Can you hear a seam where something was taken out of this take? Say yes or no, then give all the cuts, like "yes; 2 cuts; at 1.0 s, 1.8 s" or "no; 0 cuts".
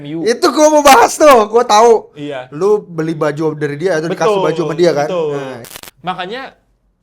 yes; 1 cut; at 5.6 s